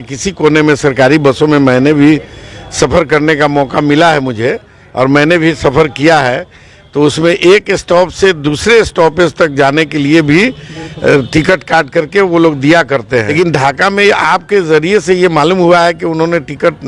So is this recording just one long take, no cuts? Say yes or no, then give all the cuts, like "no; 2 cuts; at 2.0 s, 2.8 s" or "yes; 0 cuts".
no; 1 cut; at 13.3 s